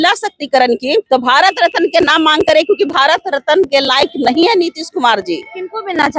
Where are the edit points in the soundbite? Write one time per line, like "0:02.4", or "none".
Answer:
0:01.0

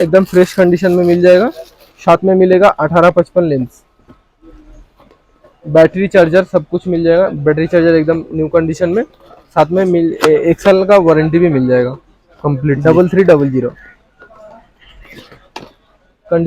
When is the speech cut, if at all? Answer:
0:12.8

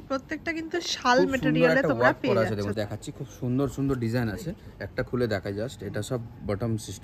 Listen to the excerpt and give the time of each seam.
0:02.7

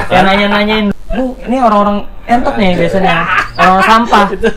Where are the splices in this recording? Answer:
0:00.9

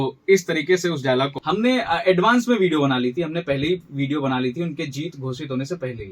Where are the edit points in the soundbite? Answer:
0:01.4

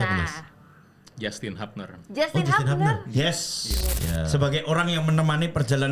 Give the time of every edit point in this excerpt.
0:03.9

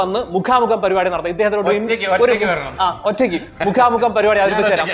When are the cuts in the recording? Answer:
none

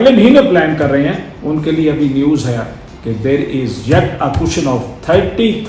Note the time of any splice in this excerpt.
none

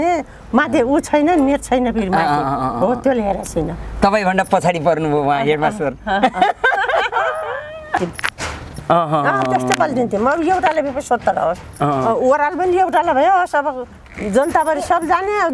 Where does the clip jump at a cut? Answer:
0:08.0

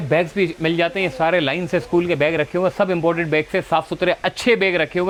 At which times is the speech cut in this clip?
none

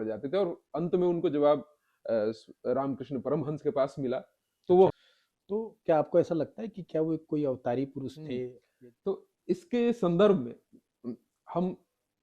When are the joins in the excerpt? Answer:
0:04.9
0:08.6

